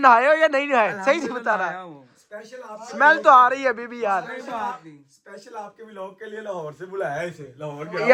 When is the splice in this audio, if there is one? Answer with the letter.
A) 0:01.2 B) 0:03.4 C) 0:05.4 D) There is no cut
D